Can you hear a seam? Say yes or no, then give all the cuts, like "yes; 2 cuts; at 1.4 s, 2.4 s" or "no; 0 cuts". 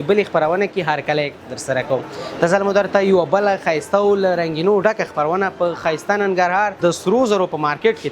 yes; 1 cut; at 6.7 s